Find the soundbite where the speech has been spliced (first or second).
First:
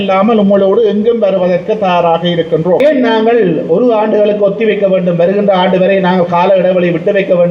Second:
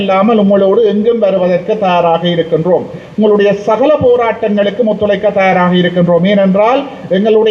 first